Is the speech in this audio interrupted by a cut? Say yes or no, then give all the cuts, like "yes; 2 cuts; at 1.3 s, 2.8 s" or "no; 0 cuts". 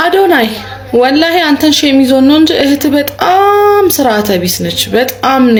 no; 0 cuts